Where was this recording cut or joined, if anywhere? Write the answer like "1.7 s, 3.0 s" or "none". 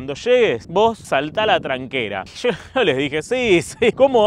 none